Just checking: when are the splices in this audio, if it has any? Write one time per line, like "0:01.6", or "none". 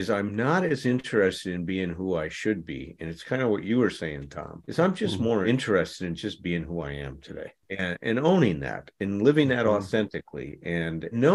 none